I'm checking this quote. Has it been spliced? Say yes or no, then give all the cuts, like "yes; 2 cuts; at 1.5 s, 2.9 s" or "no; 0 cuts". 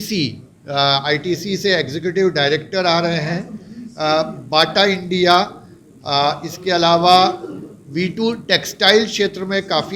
no; 0 cuts